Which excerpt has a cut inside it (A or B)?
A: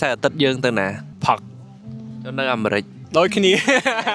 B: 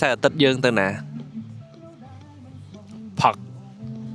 A